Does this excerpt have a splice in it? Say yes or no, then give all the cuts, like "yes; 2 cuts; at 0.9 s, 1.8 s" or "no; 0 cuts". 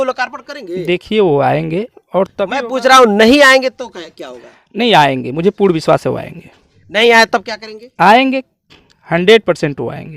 no; 0 cuts